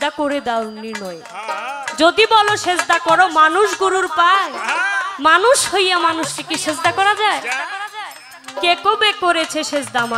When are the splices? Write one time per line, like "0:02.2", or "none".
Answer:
none